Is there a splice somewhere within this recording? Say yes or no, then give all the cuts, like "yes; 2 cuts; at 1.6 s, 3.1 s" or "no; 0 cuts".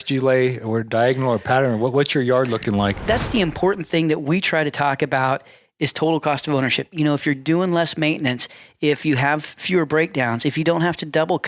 yes; 1 cut; at 3.0 s